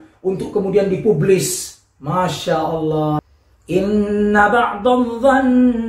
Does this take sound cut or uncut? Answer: cut